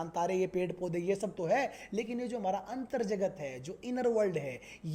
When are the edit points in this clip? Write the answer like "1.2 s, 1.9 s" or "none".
none